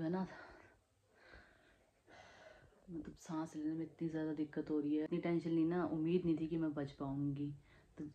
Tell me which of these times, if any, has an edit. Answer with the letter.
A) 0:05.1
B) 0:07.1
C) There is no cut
A